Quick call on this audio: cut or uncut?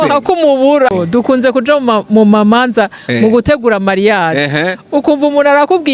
cut